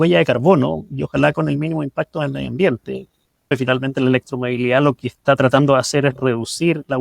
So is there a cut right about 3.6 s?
yes; 1 cut; at 3.6 s

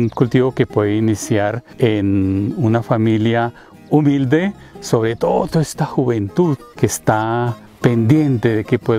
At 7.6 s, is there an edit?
yes; 3 cuts; at 1.6 s, 6.7 s, 7.6 s

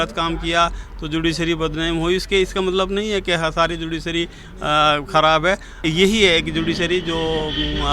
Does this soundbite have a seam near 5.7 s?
yes; 1 cut; at 5.7 s

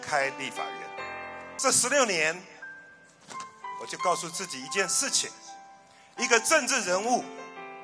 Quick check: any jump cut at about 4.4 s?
no; 1 cut; at 1.5 s

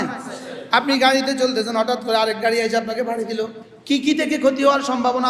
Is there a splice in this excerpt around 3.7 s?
yes; 1 cut; at 3.7 s

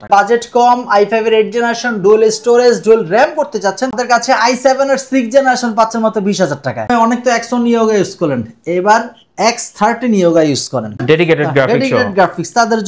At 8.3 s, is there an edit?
no; 3 cuts; at 4.0 s, 6.9 s, 11.0 s

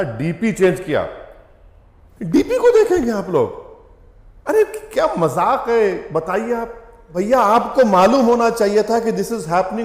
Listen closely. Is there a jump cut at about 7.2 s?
yes; 1 cut; at 7.2 s

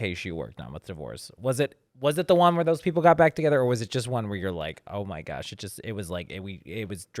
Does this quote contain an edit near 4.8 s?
no; 0 cuts

